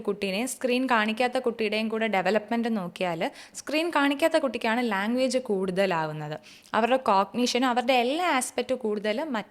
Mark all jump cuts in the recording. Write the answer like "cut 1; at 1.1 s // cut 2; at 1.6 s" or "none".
none